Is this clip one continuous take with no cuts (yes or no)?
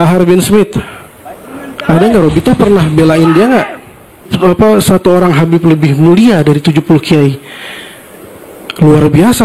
no